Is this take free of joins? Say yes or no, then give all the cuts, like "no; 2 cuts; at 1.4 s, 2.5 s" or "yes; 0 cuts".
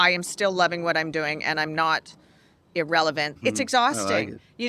no; 1 cut; at 3.3 s